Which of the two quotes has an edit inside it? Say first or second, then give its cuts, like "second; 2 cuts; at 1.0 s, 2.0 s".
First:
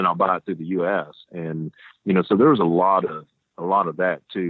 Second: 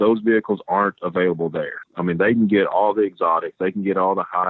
second; 1 cut; at 1.8 s